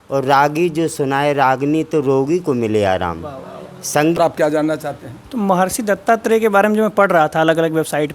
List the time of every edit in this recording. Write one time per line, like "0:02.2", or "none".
0:04.2